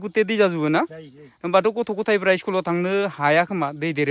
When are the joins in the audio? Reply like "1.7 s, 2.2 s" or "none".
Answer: none